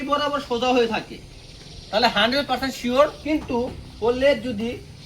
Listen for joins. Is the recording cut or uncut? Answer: cut